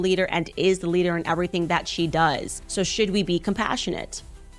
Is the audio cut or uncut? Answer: cut